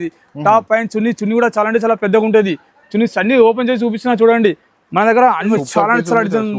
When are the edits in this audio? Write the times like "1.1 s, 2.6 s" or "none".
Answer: 5.5 s